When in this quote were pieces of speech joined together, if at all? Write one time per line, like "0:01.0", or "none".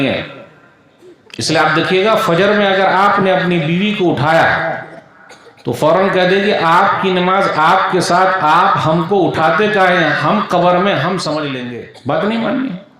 0:11.6